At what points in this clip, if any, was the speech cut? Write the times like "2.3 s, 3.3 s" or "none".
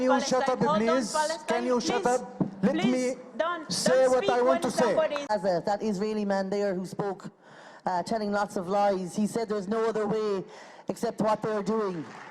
5.3 s